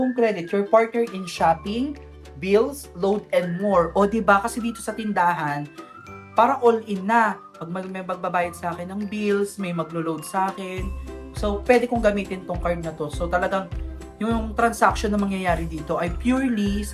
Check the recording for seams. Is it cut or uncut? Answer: uncut